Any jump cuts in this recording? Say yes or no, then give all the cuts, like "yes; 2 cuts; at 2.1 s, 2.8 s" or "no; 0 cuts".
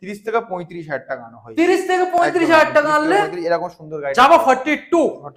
no; 0 cuts